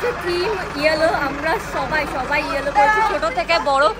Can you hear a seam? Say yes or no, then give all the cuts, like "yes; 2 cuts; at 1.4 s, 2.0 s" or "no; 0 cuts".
no; 0 cuts